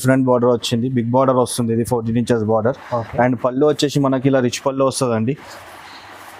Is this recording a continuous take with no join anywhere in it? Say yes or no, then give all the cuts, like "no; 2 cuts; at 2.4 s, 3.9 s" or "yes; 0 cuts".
yes; 0 cuts